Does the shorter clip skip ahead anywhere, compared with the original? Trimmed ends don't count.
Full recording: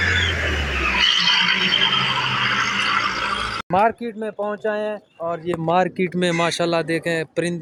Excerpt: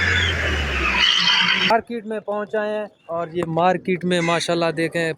yes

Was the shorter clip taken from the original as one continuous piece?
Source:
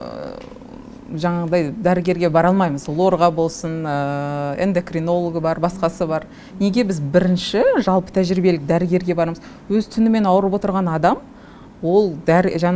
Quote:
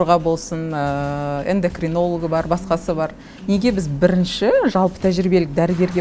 yes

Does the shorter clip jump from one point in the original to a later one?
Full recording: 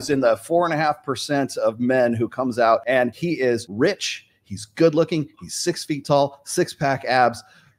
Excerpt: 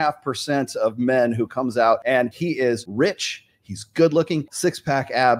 yes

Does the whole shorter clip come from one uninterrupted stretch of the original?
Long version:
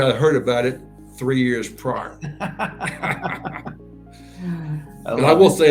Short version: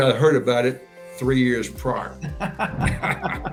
yes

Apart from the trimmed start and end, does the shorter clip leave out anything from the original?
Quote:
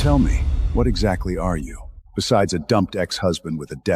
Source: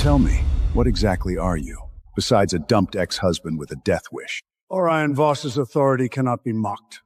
no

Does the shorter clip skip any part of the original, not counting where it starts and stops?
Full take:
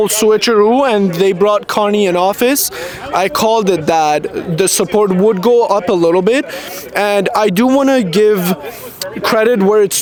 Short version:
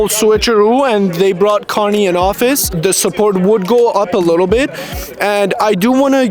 yes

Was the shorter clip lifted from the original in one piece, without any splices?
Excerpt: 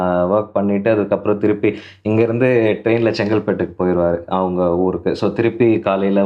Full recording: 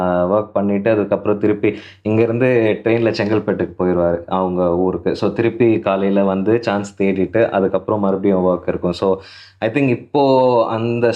yes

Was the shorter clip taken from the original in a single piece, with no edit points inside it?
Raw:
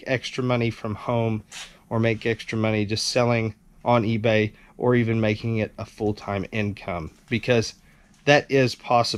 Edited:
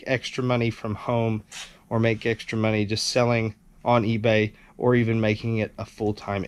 yes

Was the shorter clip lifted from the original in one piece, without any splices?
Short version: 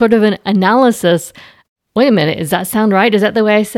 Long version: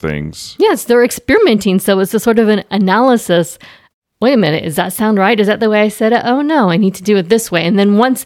yes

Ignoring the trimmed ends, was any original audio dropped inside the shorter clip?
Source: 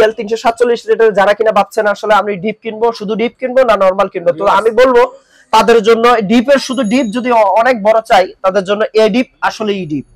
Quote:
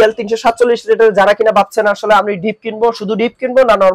no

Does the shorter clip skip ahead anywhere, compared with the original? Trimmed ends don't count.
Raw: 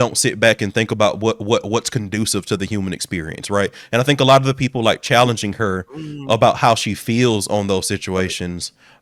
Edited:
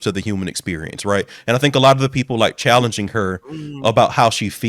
no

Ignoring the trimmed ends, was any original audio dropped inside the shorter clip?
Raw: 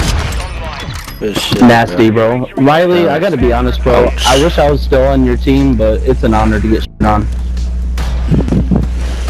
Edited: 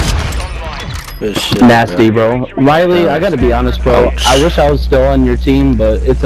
no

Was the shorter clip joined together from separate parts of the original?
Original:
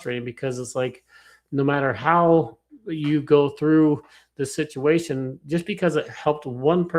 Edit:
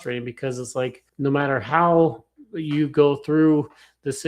yes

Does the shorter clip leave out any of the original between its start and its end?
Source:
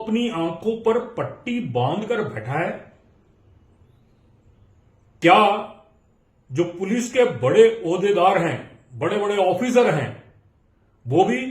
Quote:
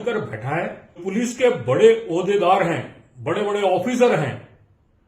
yes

